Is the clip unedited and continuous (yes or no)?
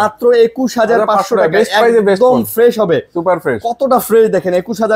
yes